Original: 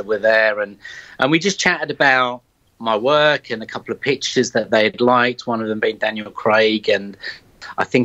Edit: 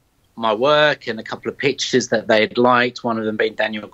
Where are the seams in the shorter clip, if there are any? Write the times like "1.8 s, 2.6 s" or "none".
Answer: none